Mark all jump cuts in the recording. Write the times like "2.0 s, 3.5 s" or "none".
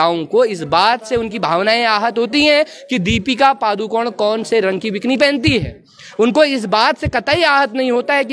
none